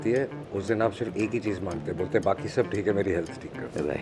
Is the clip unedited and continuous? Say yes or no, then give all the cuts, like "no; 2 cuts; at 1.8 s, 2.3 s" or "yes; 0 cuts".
yes; 0 cuts